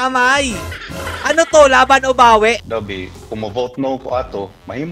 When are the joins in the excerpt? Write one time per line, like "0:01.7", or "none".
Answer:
0:02.6